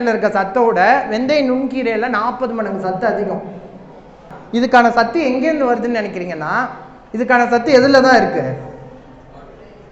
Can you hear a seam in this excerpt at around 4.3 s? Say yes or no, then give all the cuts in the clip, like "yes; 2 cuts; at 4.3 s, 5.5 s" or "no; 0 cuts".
yes; 1 cut; at 4.3 s